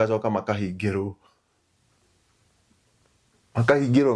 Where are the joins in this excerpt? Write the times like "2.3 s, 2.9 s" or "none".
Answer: none